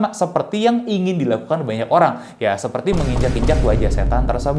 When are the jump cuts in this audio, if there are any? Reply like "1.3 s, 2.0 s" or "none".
none